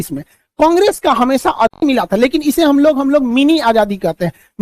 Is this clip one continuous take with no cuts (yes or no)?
no